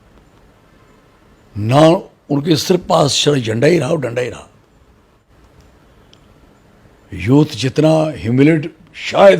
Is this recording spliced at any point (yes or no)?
yes